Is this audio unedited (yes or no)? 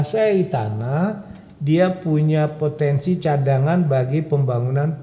yes